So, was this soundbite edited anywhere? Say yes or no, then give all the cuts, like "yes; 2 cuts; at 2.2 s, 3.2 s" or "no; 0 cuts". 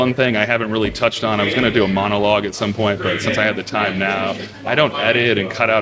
no; 0 cuts